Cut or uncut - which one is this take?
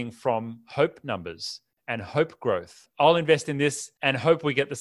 cut